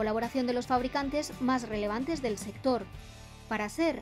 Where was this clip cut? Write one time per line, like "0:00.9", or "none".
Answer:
none